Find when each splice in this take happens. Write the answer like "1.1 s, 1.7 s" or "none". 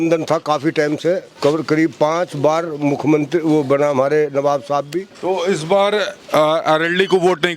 1.3 s, 5.1 s